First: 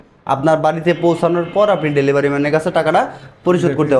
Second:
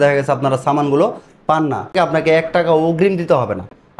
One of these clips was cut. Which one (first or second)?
second